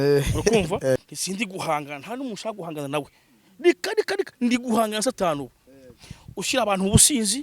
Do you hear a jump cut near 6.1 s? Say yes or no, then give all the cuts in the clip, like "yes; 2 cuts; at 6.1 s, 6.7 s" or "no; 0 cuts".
no; 1 cut; at 1.0 s